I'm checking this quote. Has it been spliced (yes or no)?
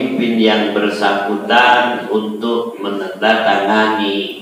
no